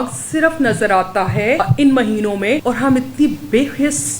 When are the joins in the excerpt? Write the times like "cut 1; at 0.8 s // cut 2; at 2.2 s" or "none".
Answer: cut 1; at 1.6 s // cut 2; at 2.6 s